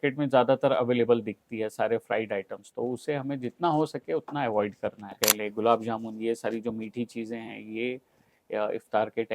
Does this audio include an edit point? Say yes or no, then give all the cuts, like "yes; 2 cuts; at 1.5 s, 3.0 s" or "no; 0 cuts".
yes; 1 cut; at 5.2 s